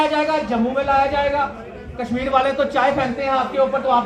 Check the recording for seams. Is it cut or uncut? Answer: uncut